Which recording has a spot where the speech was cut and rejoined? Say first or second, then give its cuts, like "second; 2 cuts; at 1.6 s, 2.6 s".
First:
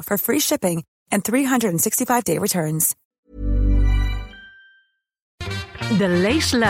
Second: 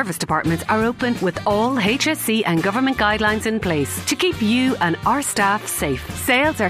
first; 2 cuts; at 3.0 s, 5.4 s